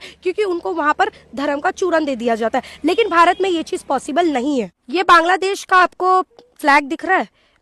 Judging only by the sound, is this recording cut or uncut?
uncut